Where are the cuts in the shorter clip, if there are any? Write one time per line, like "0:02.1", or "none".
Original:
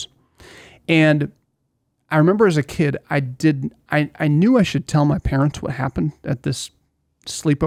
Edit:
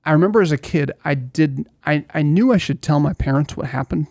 none